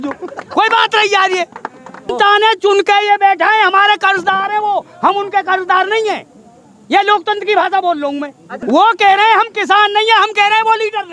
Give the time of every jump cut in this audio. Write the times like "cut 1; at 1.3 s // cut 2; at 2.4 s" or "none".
cut 1; at 2.1 s // cut 2; at 8.6 s